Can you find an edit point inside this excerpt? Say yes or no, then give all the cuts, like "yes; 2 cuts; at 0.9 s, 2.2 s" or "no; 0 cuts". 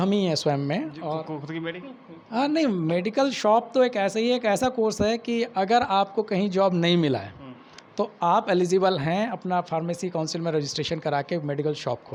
no; 0 cuts